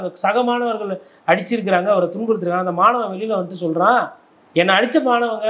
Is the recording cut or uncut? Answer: uncut